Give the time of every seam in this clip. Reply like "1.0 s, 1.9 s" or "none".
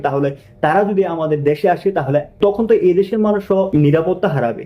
2.4 s, 3.7 s

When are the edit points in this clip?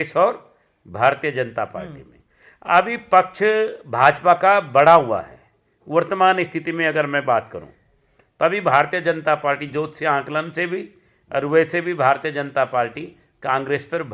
none

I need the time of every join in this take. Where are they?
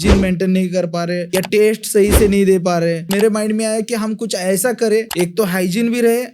1.2 s, 3.0 s, 5.1 s

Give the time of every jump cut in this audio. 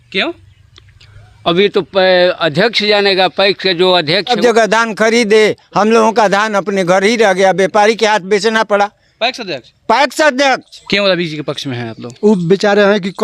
4.3 s, 10.7 s

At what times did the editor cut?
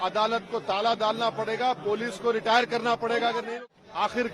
3.4 s

